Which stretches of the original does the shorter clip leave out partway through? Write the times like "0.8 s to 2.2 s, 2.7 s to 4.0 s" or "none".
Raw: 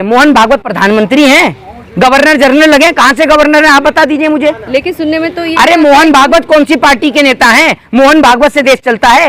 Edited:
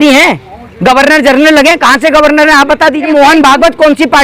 4.2 s to 5.8 s